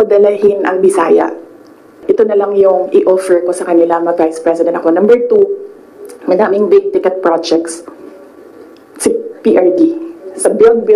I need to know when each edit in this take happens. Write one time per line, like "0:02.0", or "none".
0:02.0